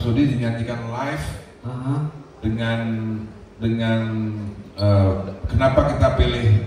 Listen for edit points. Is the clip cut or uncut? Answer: uncut